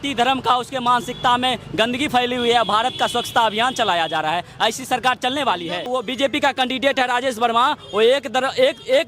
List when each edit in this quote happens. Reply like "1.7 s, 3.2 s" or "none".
5.9 s